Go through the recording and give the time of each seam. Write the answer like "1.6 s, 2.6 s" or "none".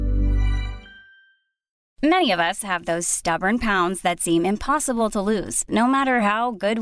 1.8 s